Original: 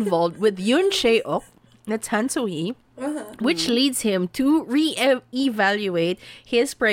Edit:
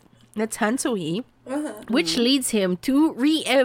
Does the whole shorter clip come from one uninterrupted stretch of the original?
yes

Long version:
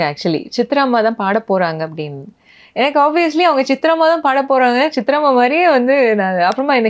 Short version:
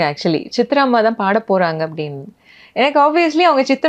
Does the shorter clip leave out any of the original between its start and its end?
no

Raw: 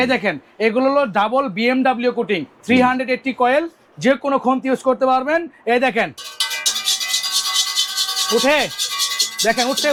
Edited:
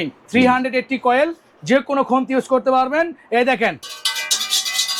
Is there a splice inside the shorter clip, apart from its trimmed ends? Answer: no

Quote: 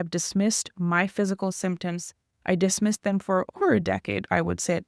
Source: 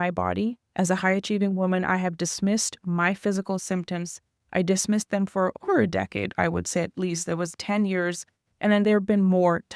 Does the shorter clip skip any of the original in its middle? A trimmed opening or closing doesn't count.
no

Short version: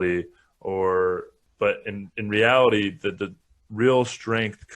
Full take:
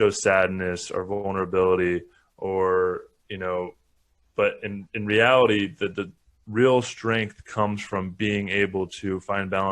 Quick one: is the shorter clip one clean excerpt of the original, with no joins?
no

